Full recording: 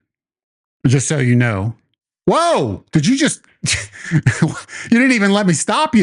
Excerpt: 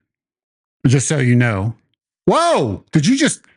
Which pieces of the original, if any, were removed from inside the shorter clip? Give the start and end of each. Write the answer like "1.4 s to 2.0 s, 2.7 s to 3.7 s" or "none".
none

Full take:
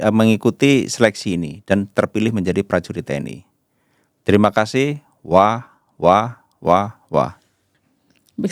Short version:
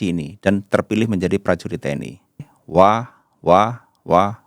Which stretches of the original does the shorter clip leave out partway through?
3.8 s to 5.1 s

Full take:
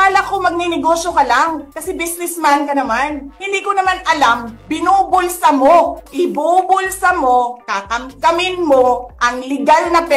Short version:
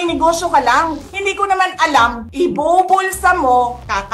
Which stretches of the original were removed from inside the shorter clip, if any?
1.7 s to 3.3 s, 4.5 s to 6.0 s

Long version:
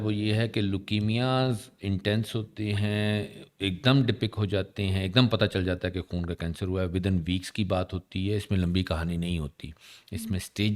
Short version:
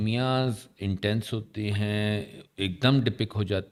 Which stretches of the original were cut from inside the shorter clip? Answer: none

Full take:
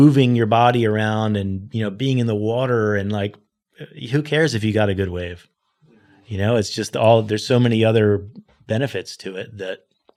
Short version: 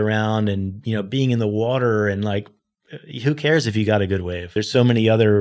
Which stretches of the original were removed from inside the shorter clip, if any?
5.4 s to 7.3 s

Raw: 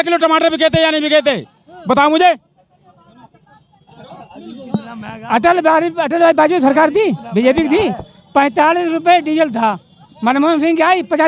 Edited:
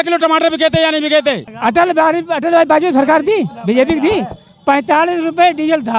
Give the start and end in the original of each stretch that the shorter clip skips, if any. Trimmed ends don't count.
1.5 s to 5.2 s

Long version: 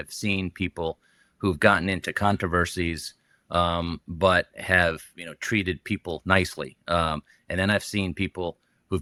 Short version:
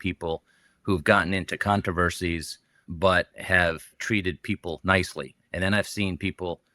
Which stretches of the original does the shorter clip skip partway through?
3.4 s to 4.0 s, 5.1 s to 5.3 s, 6.8 s to 7.3 s

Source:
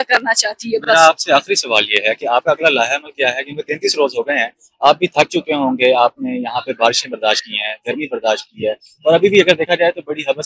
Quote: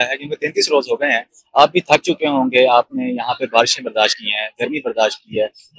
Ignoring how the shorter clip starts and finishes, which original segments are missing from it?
none

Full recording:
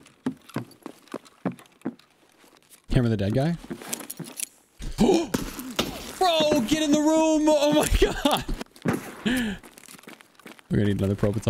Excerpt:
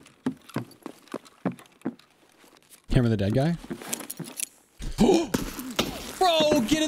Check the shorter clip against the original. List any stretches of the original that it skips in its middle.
none

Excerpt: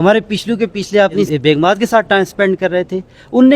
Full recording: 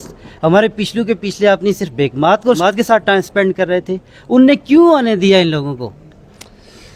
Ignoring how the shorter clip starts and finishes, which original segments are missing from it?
2.1 s to 2.5 s

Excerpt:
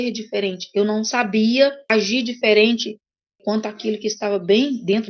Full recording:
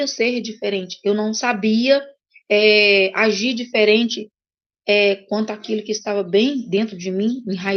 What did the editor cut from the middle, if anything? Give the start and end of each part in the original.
2.1 s to 3.1 s, 4.7 s to 5.2 s

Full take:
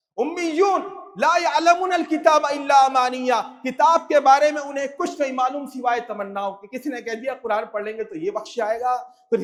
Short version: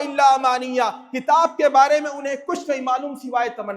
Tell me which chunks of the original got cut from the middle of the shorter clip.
none

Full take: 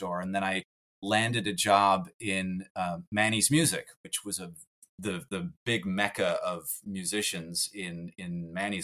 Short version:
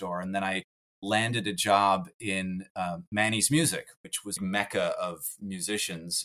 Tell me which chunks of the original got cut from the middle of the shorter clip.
4.4 s to 5.8 s

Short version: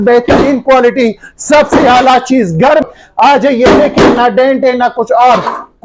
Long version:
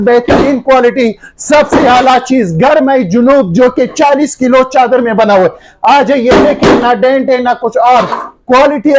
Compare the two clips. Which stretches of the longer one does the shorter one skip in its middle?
2.9 s to 5.5 s

